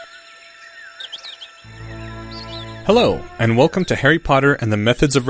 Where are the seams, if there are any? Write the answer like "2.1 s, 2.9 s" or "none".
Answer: 2.8 s